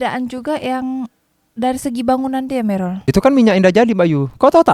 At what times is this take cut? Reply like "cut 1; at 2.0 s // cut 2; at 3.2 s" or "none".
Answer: cut 1; at 3.0 s